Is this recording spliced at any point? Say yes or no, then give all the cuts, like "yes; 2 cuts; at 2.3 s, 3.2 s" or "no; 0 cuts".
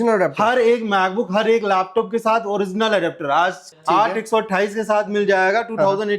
yes; 1 cut; at 3.7 s